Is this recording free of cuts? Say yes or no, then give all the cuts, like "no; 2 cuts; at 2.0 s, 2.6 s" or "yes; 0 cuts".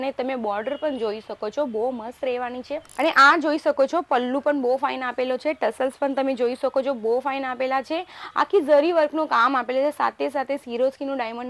no; 1 cut; at 2.8 s